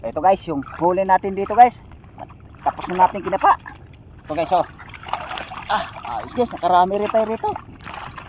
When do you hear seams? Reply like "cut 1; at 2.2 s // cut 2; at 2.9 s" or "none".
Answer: none